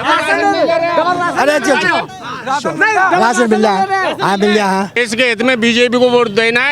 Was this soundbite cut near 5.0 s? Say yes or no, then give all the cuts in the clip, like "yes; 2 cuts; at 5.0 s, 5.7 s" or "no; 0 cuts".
yes; 1 cut; at 5.0 s